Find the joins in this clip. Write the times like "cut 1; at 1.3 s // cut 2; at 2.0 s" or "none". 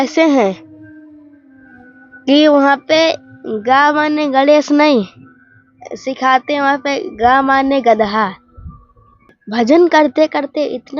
cut 1; at 9.4 s